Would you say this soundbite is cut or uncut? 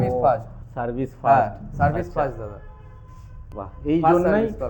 uncut